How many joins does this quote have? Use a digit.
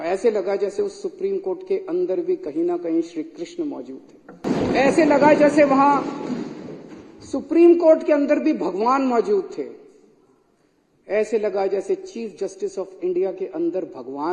1